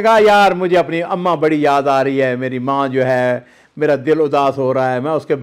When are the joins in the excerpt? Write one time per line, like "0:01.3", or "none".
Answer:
none